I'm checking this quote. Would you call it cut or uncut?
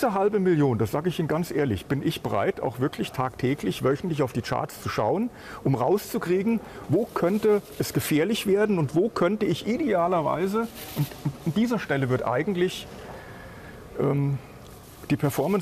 uncut